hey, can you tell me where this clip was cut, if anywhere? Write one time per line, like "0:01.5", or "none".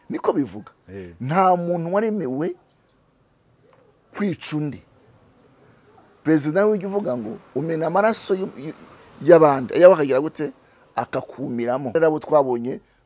0:11.9